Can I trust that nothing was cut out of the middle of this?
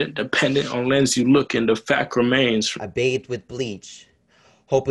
no; 1 cut; at 2.8 s

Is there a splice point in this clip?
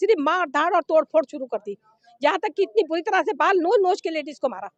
no; 0 cuts

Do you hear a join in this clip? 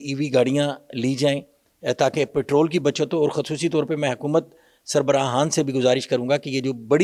no; 0 cuts

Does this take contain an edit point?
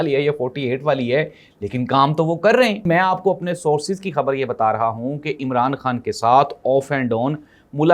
yes; 1 cut; at 2.9 s

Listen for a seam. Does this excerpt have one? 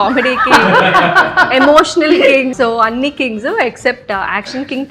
yes; 1 cut; at 2.5 s

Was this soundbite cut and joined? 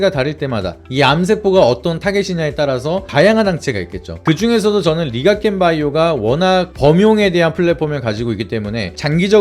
yes; 1 cut; at 4.1 s

